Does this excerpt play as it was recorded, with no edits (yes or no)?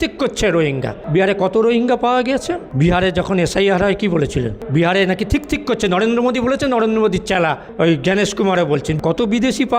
no